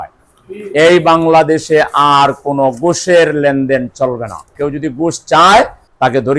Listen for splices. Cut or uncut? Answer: cut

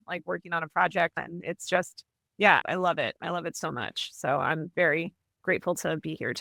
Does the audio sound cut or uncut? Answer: uncut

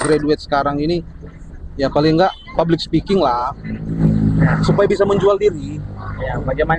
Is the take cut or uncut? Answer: cut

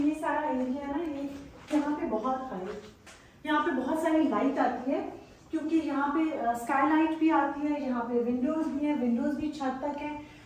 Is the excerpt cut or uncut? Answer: uncut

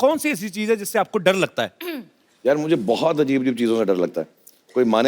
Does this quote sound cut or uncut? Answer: uncut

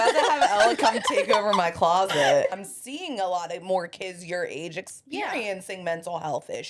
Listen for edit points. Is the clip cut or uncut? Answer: cut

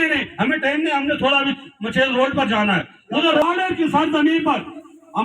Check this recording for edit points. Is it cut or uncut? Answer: cut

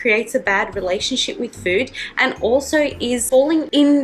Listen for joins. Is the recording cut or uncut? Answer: uncut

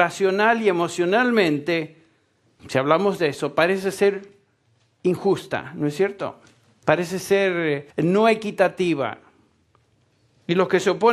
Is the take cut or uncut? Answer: cut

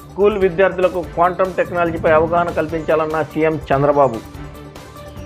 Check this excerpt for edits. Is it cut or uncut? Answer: uncut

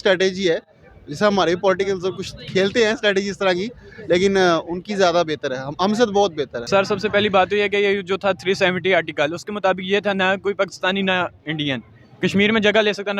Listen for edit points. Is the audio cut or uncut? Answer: cut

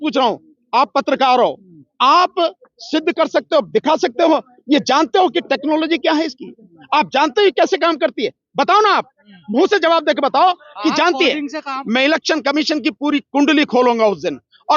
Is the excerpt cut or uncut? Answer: cut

